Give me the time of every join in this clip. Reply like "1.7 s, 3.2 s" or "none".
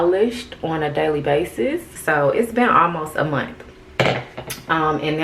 1.9 s